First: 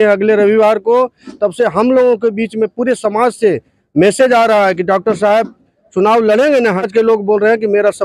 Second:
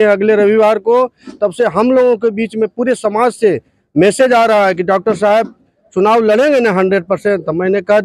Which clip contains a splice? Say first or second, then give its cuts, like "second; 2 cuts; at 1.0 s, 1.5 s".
first; 1 cut; at 6.8 s